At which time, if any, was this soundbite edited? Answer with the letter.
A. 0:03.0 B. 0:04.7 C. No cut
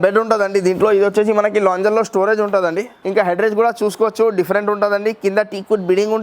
A